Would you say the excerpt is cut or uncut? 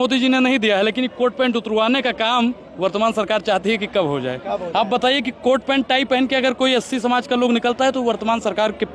uncut